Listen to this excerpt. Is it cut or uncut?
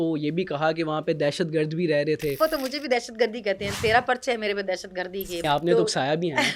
cut